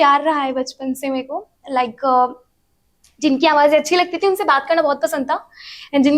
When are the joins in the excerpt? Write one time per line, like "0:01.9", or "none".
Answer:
none